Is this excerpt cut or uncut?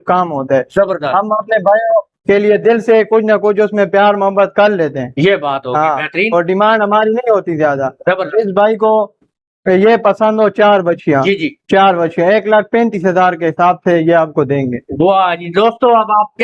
uncut